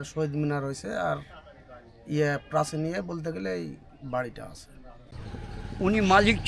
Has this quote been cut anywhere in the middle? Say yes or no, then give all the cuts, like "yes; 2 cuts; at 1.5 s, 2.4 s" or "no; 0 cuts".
yes; 1 cut; at 5.2 s